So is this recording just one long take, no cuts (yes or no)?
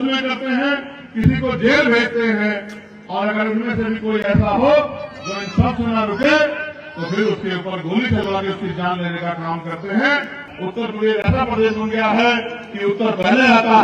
no